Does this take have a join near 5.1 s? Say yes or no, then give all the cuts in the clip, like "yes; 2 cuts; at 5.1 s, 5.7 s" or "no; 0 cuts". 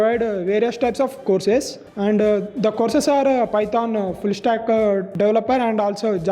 yes; 2 cuts; at 1.8 s, 5.1 s